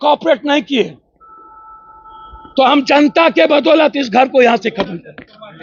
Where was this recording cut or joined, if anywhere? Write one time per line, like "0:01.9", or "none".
none